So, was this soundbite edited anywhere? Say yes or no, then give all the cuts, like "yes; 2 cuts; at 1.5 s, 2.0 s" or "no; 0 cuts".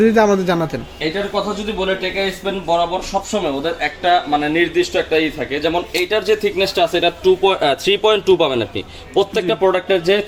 no; 0 cuts